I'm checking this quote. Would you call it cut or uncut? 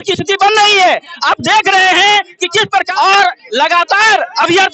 cut